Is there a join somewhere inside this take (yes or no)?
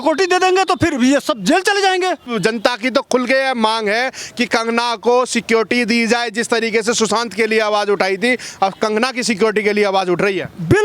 no